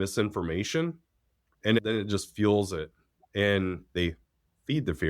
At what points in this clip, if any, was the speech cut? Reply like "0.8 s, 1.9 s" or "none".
1.7 s